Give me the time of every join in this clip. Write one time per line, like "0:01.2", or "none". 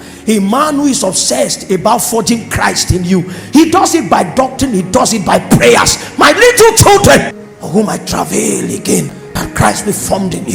0:07.5